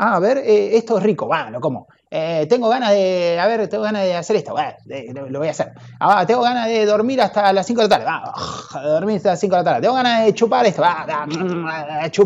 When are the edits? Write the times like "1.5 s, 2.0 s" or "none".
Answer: none